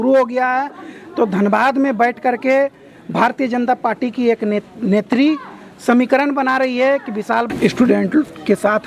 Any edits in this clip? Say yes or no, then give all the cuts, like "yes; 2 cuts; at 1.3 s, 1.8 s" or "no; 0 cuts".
yes; 1 cut; at 7.5 s